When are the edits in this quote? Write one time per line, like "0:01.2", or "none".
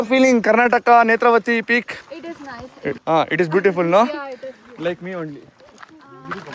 none